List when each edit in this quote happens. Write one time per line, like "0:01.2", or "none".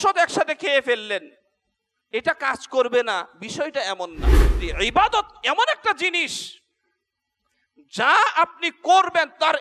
0:04.4

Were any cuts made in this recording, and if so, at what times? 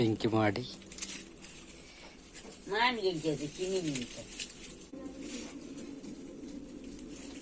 0:04.9

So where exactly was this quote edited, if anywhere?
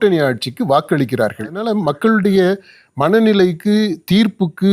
0:01.6

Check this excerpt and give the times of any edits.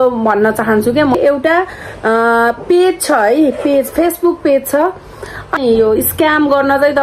0:01.2
0:05.6

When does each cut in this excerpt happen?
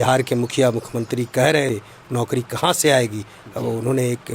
0:01.7

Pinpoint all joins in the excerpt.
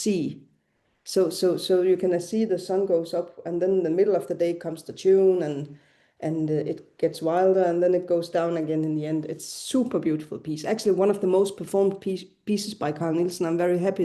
none

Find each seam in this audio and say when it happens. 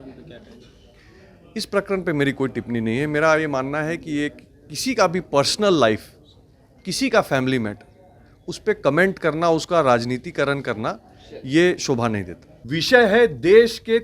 0:12.5

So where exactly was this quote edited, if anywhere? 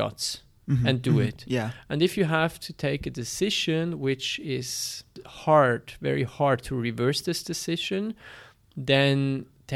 0:05.2

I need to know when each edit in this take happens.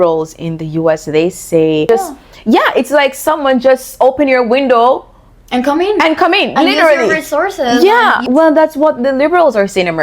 0:01.9
0:08.2

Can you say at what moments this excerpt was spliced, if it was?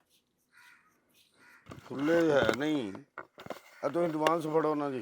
0:01.7

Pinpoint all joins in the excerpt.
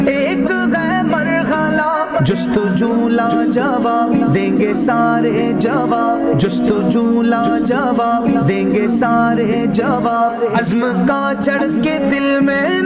none

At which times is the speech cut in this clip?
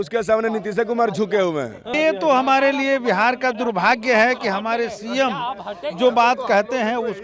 0:01.9

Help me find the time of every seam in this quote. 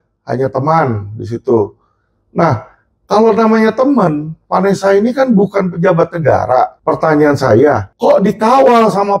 0:06.8
0:07.9

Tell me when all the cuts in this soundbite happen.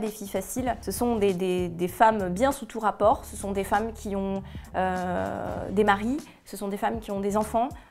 none

